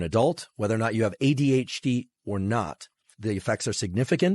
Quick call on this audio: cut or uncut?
cut